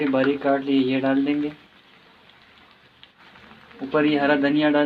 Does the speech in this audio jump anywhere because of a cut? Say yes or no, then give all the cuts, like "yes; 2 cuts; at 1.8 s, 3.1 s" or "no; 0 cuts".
yes; 1 cut; at 3.2 s